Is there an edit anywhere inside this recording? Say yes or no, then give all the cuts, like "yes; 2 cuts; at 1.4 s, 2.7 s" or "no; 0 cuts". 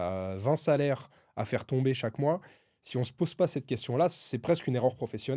no; 0 cuts